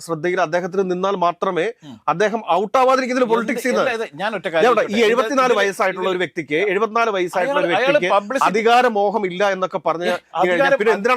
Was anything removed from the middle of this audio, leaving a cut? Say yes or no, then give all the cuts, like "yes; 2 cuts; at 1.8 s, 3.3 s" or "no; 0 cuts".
no; 0 cuts